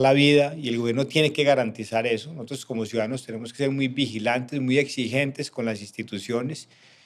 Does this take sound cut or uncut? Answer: uncut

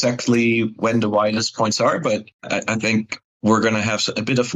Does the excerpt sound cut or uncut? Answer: uncut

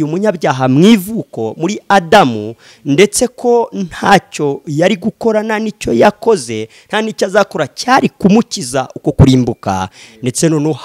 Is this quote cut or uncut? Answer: uncut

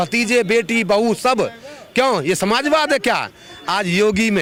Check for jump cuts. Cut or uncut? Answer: uncut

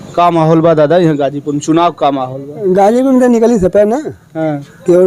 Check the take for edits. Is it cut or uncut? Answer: uncut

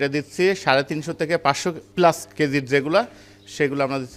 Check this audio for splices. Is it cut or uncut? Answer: cut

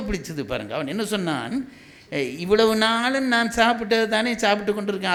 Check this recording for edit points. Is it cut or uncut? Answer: uncut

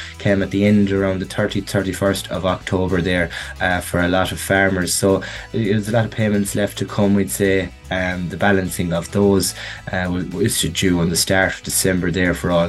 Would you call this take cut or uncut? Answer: cut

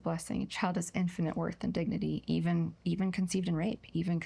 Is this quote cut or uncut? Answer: uncut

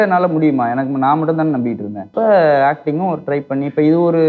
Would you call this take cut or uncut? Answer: cut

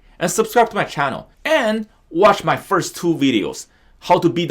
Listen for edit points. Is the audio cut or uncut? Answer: cut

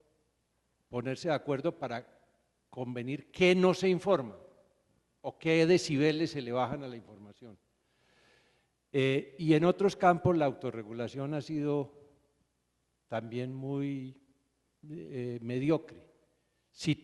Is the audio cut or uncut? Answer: uncut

